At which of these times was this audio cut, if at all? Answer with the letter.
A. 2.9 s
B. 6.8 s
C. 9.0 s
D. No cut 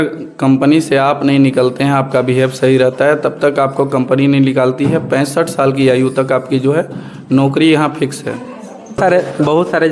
C